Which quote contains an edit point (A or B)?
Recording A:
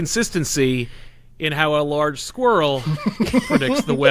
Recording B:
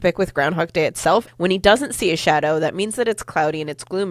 B